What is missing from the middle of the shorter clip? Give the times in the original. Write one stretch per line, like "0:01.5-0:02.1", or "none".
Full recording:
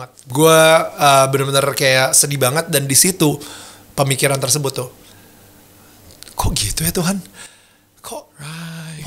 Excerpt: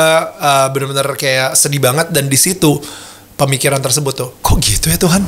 0:04.9-0:06.3